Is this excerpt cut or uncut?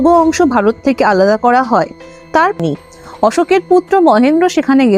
cut